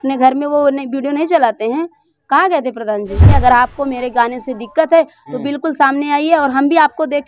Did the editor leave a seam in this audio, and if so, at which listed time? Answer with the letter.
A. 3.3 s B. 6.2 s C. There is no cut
A